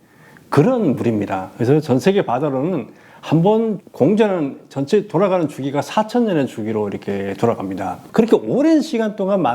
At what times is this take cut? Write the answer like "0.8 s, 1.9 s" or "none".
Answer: 8.0 s